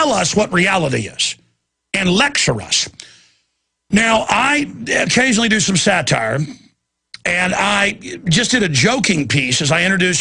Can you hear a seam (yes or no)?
no